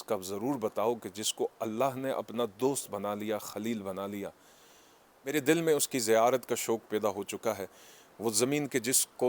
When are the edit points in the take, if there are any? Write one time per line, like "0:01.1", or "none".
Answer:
none